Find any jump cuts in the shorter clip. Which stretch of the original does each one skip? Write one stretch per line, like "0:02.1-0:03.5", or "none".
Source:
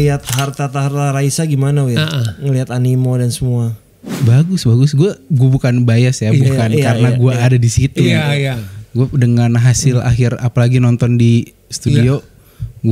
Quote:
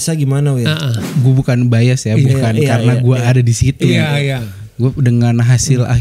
0:02.4-0:05.2